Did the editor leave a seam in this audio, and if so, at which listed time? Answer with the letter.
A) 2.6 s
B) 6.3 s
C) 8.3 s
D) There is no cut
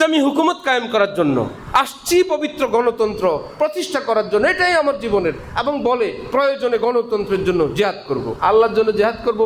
C